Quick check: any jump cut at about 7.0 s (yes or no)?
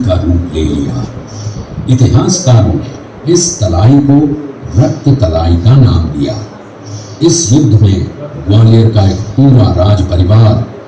no